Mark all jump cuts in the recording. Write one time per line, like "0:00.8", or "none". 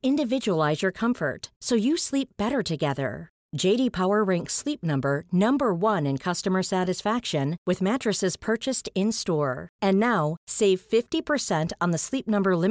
none